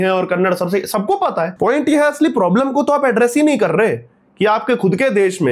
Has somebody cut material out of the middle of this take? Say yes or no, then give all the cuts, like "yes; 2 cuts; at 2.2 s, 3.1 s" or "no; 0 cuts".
yes; 1 cut; at 1.5 s